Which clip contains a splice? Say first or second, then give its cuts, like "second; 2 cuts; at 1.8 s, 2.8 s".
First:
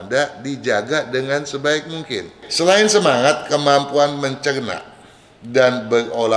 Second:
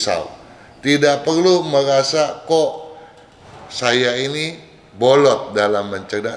first; 1 cut; at 2.4 s